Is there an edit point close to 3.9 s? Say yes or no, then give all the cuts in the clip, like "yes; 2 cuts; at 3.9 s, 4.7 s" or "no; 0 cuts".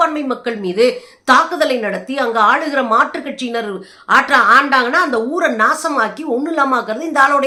no; 0 cuts